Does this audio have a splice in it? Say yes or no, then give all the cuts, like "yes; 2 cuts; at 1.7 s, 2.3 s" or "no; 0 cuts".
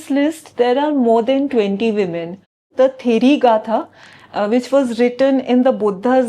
yes; 1 cut; at 2.7 s